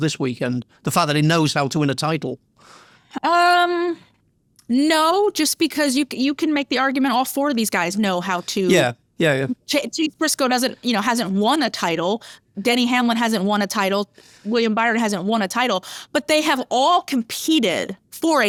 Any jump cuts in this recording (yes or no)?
no